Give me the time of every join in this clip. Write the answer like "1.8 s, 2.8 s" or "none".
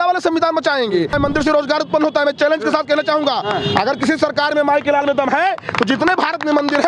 1.1 s